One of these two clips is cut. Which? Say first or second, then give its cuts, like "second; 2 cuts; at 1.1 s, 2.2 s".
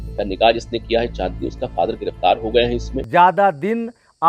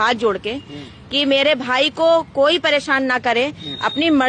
first; 1 cut; at 2.9 s